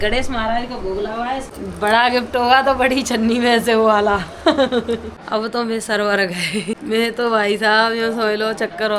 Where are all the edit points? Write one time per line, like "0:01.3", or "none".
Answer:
0:01.5
0:05.1
0:06.8